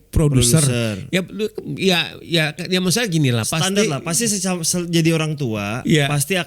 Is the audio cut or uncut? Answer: uncut